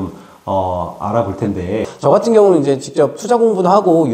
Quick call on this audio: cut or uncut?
cut